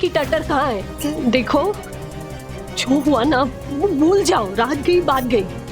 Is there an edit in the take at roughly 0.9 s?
yes; 1 cut; at 0.9 s

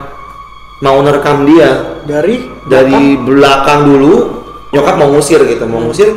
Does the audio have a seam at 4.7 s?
yes; 1 cut; at 4.7 s

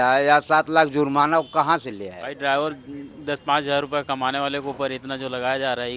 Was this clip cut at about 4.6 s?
no; 1 cut; at 2.3 s

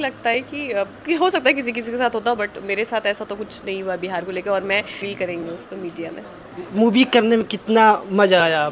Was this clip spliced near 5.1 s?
yes; 1 cut; at 5.1 s

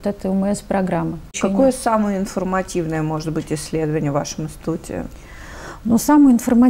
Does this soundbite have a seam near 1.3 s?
yes; 1 cut; at 1.3 s

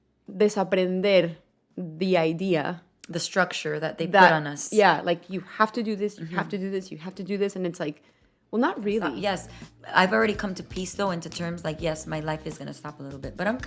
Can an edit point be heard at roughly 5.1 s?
no; 1 cut; at 9.2 s

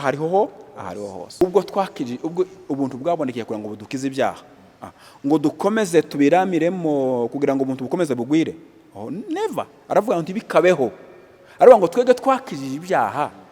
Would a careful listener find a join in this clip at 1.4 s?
yes; 1 cut; at 1.4 s

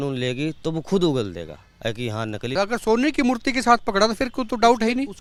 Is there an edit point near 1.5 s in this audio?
no; 0 cuts

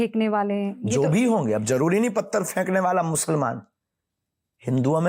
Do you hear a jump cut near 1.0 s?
no; 0 cuts

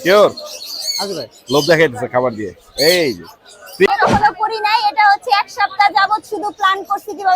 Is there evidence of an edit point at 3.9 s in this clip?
yes; 1 cut; at 3.9 s

